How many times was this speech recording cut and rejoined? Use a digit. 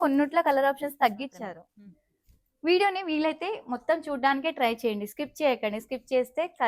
1